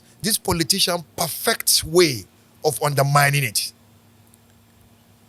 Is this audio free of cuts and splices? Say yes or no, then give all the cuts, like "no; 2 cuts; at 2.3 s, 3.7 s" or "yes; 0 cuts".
yes; 0 cuts